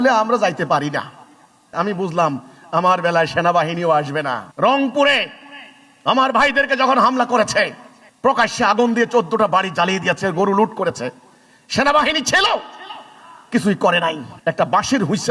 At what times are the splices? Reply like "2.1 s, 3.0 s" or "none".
4.5 s, 14.3 s